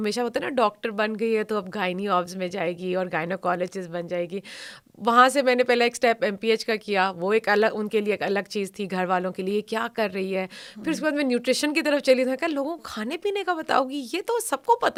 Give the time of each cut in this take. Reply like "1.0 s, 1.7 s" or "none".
none